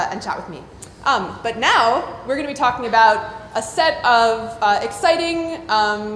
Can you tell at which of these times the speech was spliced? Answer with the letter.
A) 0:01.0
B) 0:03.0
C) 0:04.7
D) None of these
B